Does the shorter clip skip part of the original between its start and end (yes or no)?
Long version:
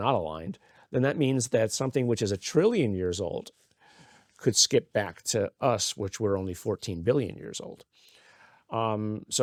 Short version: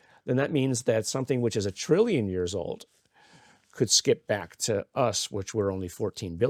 no